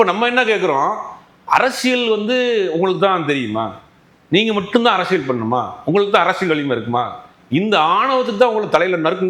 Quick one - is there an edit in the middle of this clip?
no; 0 cuts

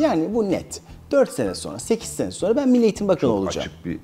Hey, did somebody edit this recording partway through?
no; 0 cuts

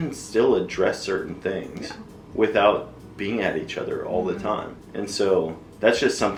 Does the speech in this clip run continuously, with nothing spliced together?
yes; 0 cuts

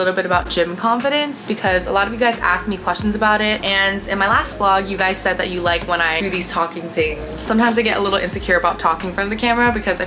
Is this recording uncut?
yes; 0 cuts

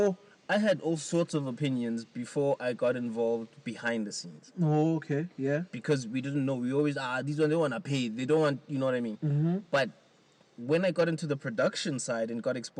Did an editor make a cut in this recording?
no; 0 cuts

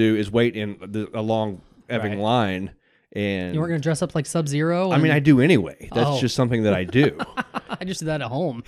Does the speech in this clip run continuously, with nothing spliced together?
yes; 0 cuts

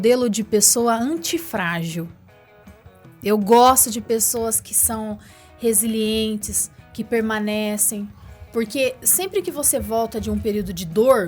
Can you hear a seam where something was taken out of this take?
no; 0 cuts

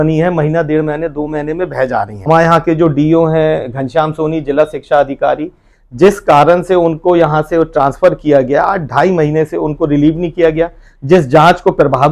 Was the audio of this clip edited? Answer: yes; 1 cut; at 2.1 s

